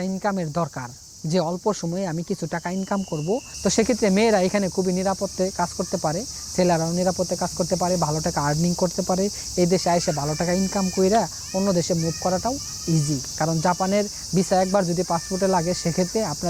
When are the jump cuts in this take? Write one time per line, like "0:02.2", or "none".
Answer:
0:03.5